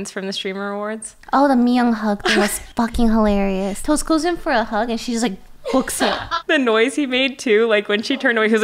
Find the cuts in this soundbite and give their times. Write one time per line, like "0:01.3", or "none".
0:03.8
0:06.3